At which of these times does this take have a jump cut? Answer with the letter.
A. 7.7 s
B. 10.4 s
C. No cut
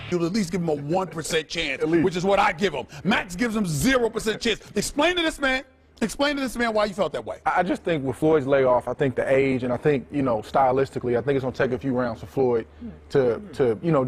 A